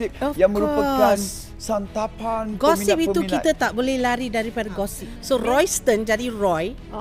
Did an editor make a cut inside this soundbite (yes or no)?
yes